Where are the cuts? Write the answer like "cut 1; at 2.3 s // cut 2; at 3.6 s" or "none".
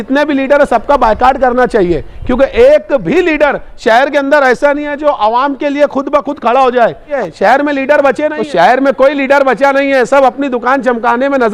cut 1; at 7.1 s // cut 2; at 8.4 s